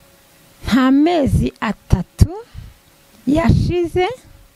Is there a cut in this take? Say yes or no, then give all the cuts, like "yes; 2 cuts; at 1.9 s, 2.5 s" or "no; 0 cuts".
no; 0 cuts